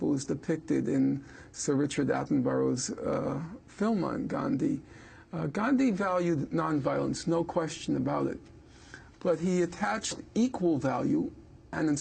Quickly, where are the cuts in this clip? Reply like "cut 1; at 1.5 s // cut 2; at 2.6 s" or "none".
cut 1; at 8.2 s